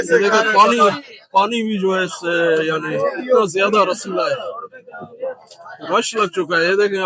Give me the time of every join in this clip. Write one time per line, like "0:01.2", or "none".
none